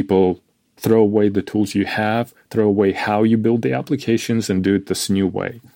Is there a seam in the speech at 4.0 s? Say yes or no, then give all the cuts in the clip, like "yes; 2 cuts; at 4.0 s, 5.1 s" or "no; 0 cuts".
no; 0 cuts